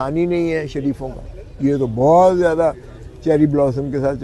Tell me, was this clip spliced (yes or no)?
no